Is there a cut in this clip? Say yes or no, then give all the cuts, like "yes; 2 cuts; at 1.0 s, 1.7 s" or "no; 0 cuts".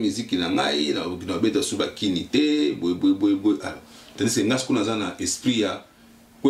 no; 0 cuts